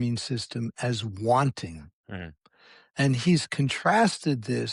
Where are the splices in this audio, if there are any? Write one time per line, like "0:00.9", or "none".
none